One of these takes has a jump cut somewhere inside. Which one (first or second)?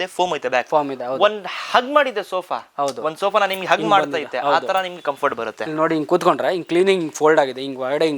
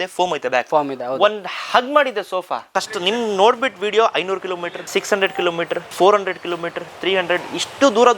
second